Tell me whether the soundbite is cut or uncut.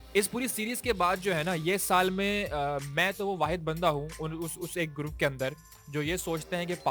uncut